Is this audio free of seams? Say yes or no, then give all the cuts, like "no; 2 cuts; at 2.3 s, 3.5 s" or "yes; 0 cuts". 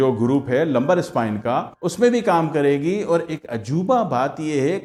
yes; 0 cuts